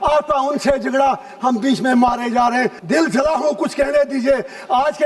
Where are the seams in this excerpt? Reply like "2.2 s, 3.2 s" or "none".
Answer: 2.8 s